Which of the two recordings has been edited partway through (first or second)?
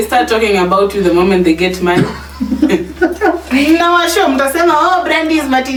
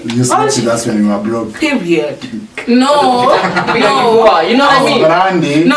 second